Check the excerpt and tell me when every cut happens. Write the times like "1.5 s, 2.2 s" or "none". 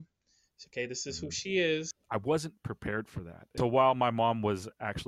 2.0 s, 3.5 s